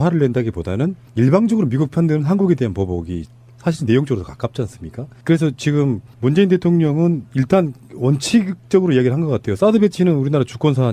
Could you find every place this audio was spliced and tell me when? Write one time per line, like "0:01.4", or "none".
0:03.8